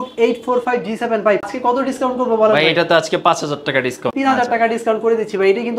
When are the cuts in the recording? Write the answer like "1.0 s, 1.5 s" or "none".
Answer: 1.5 s, 4.1 s